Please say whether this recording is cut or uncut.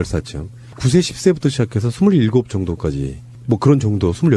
cut